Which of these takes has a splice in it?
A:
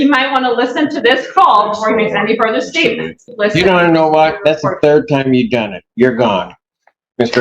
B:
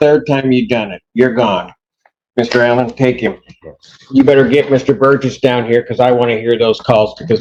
A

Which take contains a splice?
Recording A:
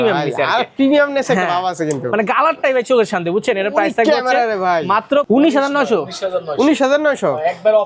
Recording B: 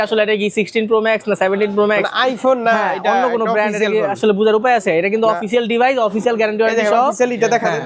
A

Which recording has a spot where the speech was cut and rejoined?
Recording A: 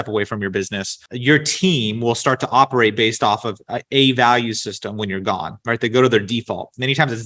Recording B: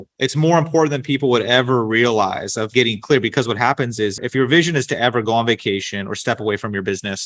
B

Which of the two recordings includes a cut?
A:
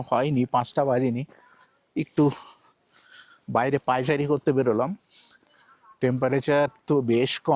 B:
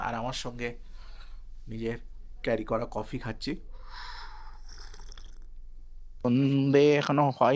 B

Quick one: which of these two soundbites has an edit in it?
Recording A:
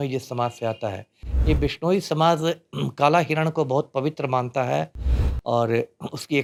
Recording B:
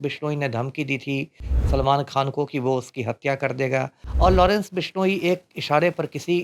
B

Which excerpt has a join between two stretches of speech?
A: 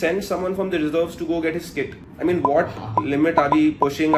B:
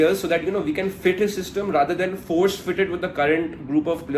A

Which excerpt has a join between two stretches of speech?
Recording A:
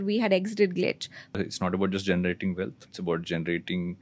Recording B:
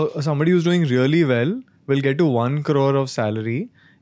A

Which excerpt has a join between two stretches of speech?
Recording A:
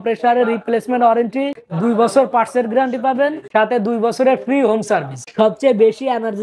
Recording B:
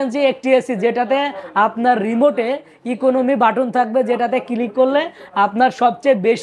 A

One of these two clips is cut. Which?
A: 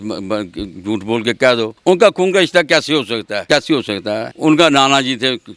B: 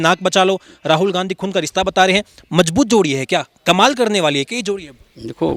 A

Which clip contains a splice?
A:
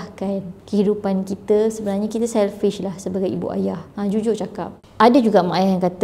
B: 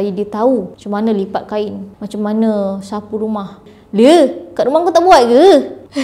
A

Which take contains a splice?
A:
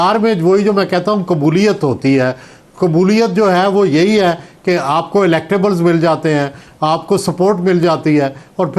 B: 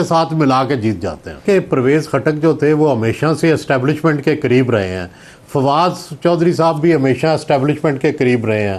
B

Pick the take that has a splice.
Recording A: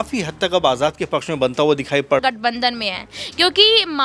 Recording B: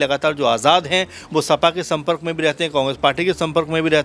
A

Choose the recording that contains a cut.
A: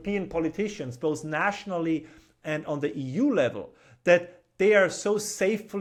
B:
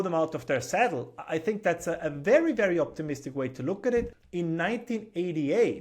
B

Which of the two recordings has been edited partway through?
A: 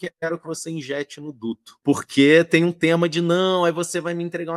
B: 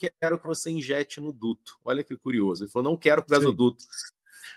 A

